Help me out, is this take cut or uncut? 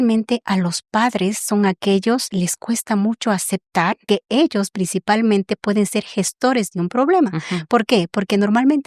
cut